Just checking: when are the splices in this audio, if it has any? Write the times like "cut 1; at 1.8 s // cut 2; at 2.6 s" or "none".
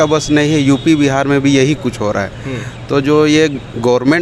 none